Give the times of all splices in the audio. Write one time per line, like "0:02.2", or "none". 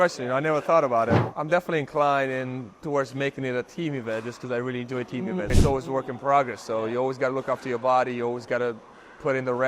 0:01.3
0:05.6